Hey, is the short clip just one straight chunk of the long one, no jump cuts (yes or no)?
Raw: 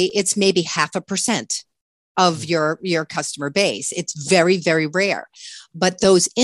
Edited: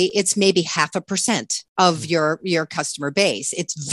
no